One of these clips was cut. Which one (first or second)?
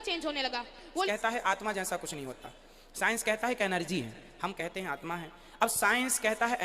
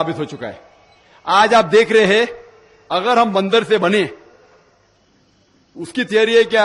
first